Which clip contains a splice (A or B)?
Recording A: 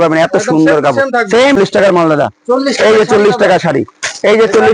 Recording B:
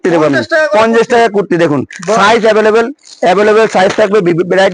A